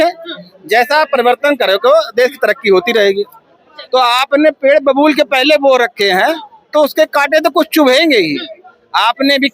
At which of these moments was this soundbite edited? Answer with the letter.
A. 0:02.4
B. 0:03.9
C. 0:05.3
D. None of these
B